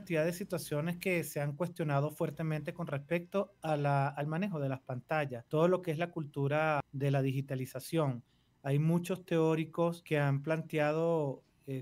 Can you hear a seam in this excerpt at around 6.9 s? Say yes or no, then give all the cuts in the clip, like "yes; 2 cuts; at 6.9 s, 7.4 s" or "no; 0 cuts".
yes; 3 cuts; at 5.4 s, 6.9 s, 10.0 s